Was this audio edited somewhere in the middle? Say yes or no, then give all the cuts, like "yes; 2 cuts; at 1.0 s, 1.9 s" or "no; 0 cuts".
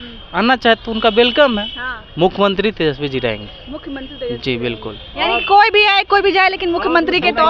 no; 0 cuts